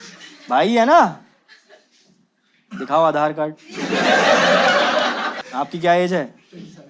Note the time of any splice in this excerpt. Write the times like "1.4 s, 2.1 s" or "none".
5.4 s